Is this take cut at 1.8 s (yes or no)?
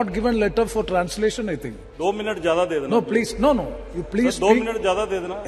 yes